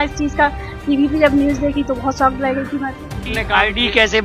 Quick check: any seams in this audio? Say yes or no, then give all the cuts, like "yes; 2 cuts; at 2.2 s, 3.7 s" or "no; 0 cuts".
yes; 1 cut; at 3.2 s